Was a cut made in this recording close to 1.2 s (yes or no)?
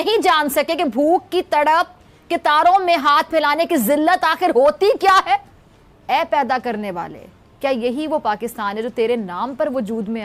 no